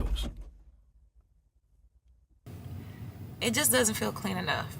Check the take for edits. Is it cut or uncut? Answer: cut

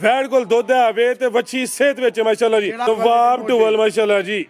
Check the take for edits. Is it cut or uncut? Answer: cut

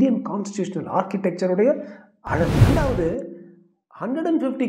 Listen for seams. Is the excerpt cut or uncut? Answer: cut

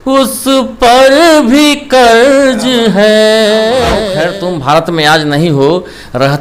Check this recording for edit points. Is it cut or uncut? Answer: cut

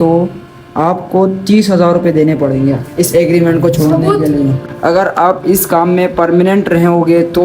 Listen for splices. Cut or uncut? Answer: uncut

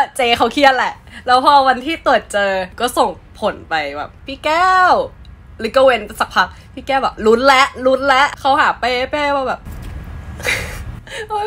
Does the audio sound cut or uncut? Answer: cut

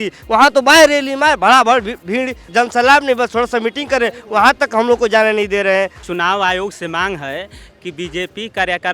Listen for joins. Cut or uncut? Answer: cut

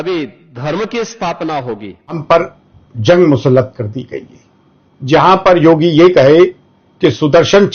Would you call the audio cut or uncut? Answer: cut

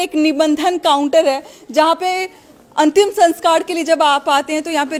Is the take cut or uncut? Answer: uncut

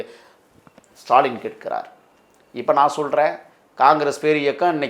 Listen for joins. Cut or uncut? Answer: uncut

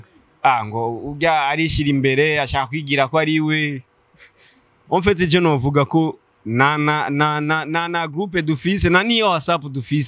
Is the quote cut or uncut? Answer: uncut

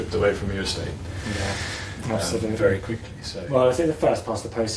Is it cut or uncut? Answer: uncut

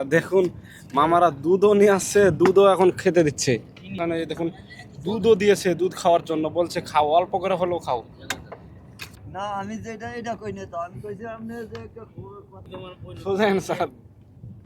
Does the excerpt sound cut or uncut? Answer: cut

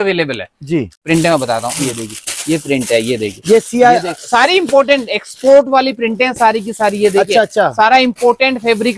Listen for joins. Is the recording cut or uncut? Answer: cut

